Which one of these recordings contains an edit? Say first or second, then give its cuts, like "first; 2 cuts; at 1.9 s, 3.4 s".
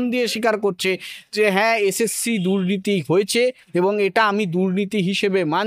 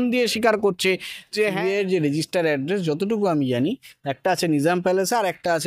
second; 1 cut; at 1.5 s